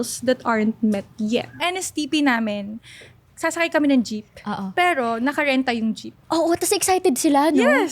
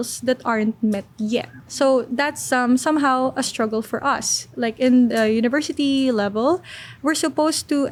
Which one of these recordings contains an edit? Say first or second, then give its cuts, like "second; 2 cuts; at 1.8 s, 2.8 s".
first; 2 cuts; at 1.6 s, 6.1 s